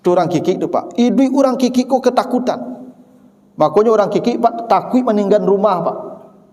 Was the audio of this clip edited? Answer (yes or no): no